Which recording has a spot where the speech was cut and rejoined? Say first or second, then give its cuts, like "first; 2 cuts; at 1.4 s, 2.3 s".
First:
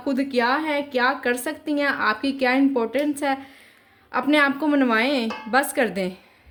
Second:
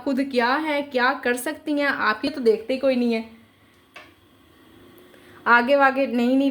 second; 1 cut; at 2.3 s